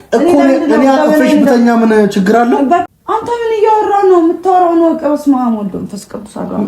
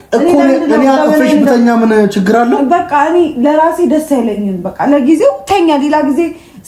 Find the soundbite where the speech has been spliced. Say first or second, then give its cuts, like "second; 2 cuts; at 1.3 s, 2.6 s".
first; 1 cut; at 2.9 s